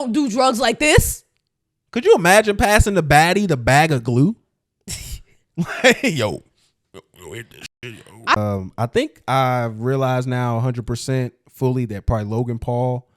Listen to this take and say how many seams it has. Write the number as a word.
one